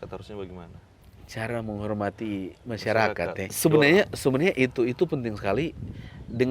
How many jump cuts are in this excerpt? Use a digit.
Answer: 1